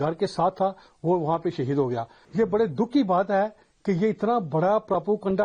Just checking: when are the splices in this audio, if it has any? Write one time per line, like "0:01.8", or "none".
0:02.2